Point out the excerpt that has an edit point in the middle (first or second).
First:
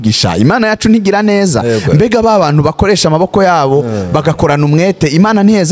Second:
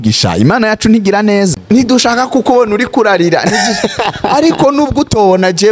second